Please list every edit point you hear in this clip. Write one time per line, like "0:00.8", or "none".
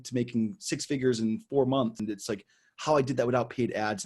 0:02.0